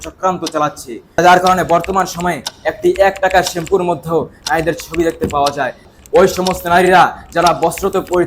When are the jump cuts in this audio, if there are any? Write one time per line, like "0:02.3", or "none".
0:01.2
0:05.8